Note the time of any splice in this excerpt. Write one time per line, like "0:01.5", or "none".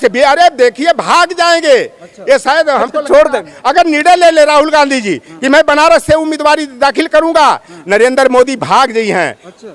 none